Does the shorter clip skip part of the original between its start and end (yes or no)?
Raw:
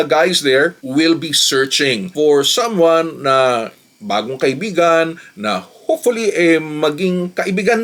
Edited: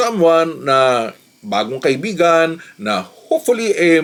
no